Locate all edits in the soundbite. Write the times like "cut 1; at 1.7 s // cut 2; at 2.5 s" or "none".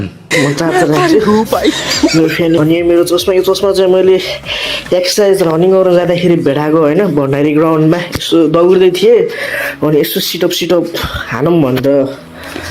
cut 1; at 2.6 s